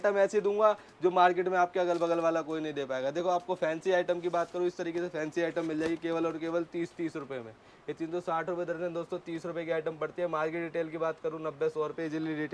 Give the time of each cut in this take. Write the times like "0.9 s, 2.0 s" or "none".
none